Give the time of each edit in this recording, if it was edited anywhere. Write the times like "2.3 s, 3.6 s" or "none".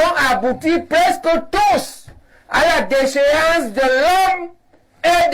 none